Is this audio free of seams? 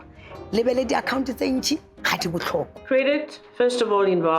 no; 1 cut; at 2.8 s

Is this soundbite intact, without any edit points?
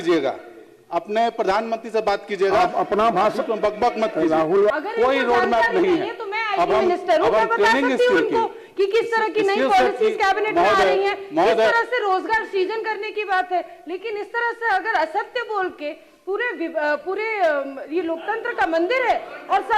no; 1 cut; at 4.7 s

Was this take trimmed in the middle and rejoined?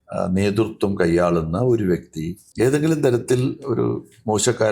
yes; 1 cut; at 2.4 s

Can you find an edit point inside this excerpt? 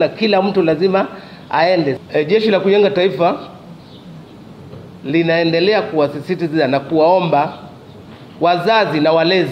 yes; 1 cut; at 2.0 s

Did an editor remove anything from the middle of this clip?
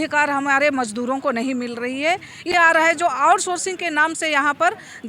yes; 1 cut; at 2.6 s

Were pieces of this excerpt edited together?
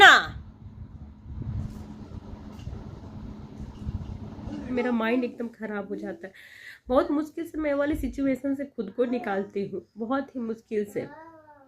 yes; 1 cut; at 4.7 s

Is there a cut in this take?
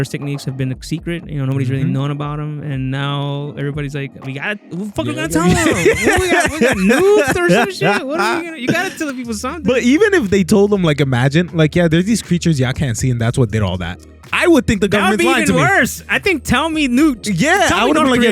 no; 0 cuts

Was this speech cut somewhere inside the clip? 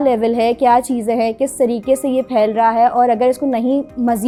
no; 0 cuts

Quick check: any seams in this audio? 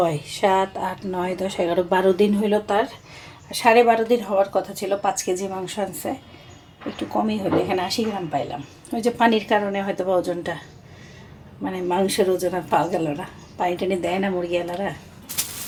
no; 0 cuts

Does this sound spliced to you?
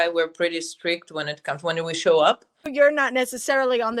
yes; 1 cut; at 2.7 s

